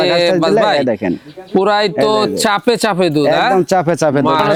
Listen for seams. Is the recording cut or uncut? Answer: uncut